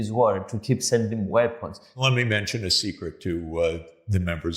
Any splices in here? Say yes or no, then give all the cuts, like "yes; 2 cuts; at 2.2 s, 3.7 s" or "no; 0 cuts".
yes; 1 cut; at 2.0 s